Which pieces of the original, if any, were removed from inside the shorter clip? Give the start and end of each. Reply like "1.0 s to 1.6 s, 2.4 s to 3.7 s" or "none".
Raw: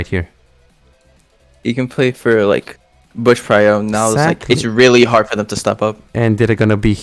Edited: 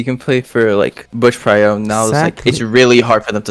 2.7 s to 3.1 s